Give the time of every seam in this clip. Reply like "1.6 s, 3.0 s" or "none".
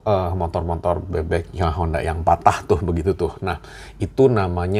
none